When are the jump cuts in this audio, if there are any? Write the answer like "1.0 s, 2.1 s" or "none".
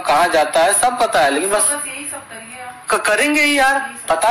none